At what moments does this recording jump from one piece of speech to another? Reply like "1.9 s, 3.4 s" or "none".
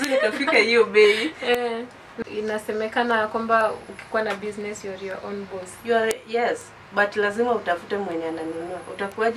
2.2 s